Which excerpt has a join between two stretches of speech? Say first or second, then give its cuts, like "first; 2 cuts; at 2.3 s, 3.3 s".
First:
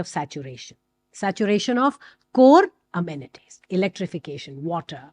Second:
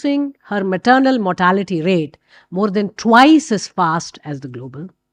first; 1 cut; at 2.8 s